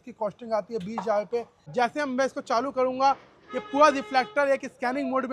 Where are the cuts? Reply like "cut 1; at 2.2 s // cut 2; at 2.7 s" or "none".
cut 1; at 1.6 s